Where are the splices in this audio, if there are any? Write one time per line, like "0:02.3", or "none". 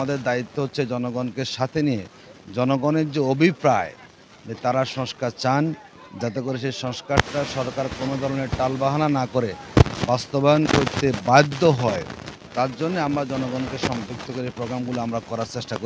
none